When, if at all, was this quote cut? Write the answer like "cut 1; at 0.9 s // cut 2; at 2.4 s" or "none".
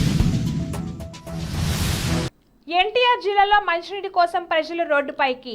cut 1; at 2.3 s

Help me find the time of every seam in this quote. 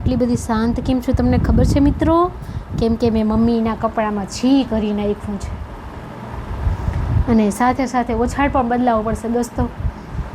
none

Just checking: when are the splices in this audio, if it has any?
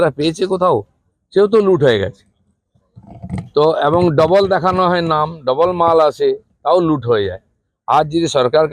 none

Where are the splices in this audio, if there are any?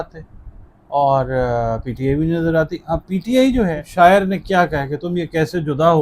cut 1; at 3.8 s

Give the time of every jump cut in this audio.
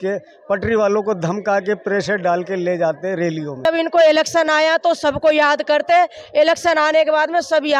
cut 1; at 3.6 s

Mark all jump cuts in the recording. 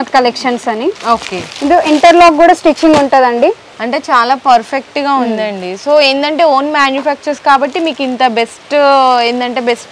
none

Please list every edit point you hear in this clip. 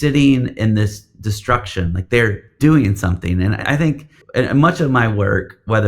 cut 1; at 2.4 s // cut 2; at 3.6 s

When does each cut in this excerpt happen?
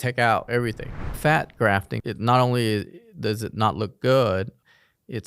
cut 1; at 1.0 s // cut 2; at 2.0 s

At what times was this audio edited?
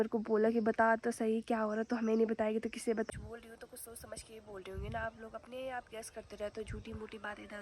cut 1; at 3.1 s

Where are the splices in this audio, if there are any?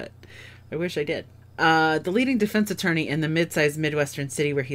none

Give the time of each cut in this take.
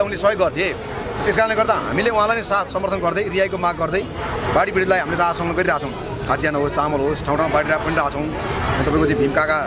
none

